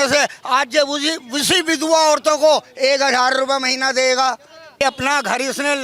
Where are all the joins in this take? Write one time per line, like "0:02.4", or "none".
0:04.8